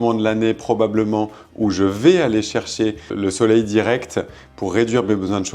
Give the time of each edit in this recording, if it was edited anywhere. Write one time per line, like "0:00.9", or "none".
0:03.1

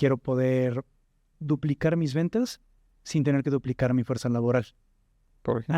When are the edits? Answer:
0:01.3

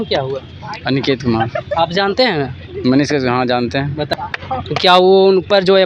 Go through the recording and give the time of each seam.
0:04.1

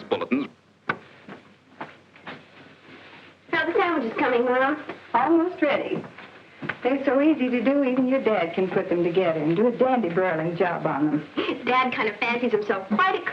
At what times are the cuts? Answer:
0:02.4

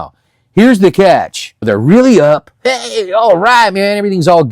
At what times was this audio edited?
0:01.6

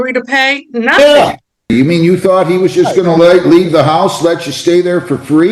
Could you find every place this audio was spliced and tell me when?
0:01.7

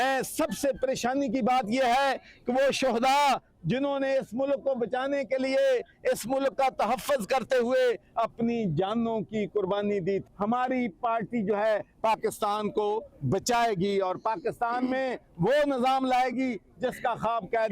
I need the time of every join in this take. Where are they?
0:10.2

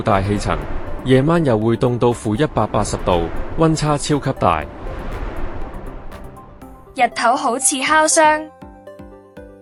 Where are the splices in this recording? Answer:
none

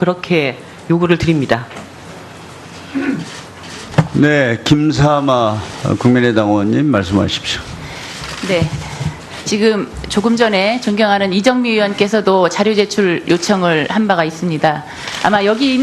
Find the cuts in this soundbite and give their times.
none

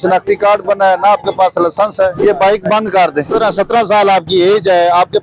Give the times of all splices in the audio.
0:02.2
0:03.2

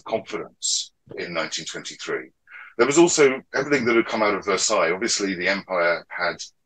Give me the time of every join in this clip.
0:01.1

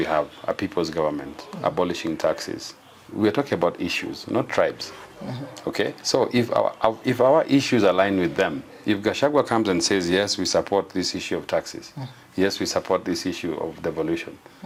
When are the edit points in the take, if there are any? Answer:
none

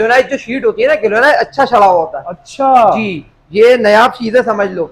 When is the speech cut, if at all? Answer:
none

